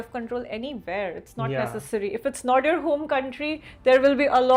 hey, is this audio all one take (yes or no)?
yes